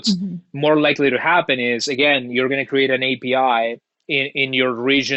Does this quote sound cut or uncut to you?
uncut